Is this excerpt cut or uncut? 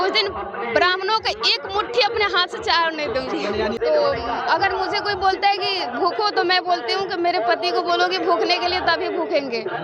cut